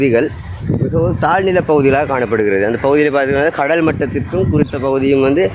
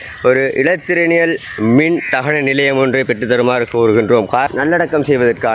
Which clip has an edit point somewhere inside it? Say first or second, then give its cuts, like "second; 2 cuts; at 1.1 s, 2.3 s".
second; 1 cut; at 4.5 s